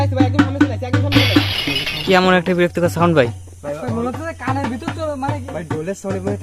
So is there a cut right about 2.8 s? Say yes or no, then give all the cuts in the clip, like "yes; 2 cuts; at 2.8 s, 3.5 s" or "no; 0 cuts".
no; 1 cut; at 1.6 s